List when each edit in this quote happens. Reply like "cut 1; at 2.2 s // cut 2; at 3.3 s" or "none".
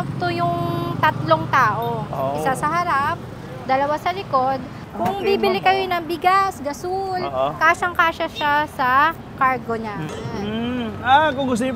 cut 1; at 4.8 s // cut 2; at 10.1 s